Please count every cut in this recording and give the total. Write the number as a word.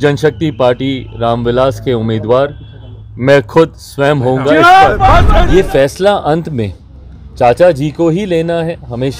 one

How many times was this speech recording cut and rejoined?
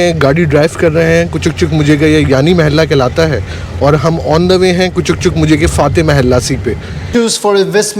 one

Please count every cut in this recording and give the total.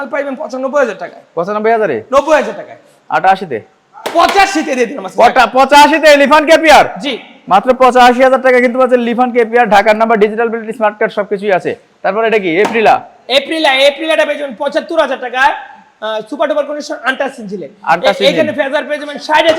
zero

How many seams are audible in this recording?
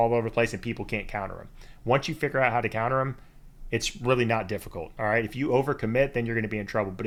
zero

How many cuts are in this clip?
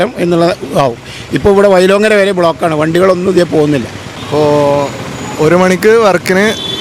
zero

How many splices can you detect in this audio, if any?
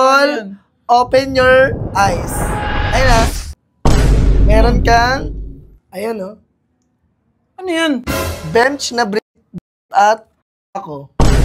zero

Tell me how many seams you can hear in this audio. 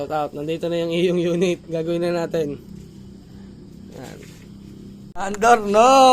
one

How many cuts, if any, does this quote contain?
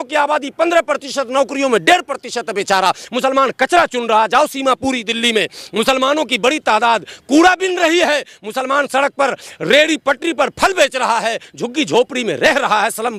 zero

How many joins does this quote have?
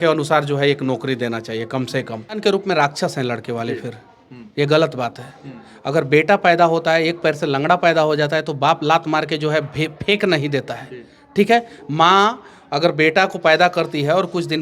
one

